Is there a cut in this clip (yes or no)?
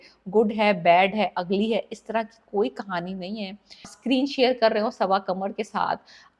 yes